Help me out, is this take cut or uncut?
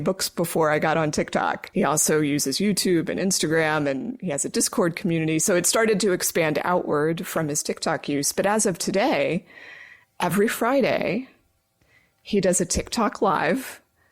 cut